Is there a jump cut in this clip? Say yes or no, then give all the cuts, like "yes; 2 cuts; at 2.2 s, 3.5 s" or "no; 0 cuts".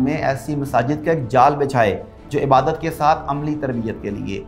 no; 0 cuts